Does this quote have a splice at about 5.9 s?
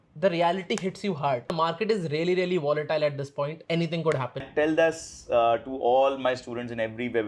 no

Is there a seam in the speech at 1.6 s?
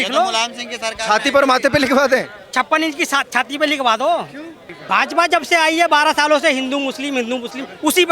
no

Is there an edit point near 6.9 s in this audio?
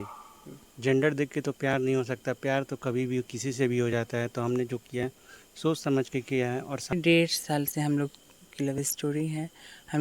yes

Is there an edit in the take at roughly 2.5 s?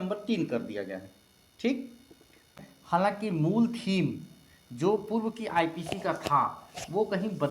yes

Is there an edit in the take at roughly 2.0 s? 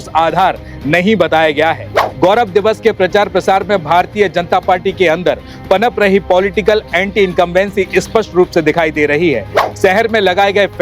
yes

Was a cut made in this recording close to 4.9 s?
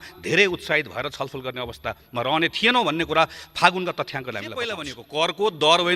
yes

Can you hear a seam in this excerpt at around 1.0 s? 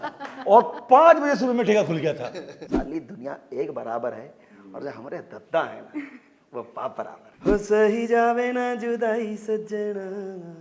no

